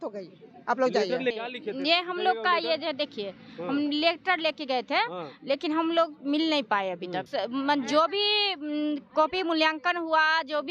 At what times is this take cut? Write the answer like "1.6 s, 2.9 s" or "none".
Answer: 1.3 s, 7.2 s